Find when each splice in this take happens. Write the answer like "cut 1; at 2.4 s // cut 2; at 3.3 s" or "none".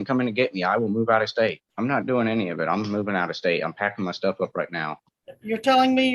cut 1; at 1.6 s

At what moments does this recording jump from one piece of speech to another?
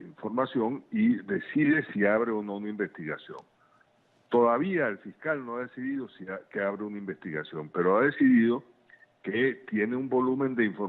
cut 1; at 8.3 s

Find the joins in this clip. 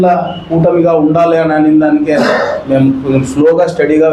none

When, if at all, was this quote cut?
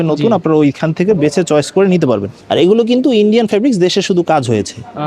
cut 1; at 2.3 s

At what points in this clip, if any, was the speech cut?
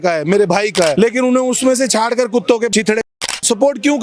cut 1; at 0.9 s // cut 2; at 3.2 s

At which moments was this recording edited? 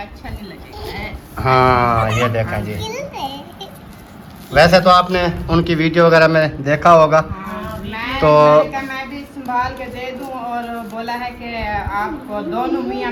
none

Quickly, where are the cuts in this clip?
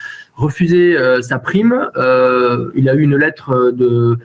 none

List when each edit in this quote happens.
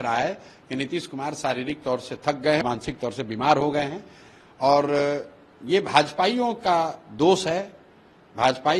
cut 1; at 2.6 s

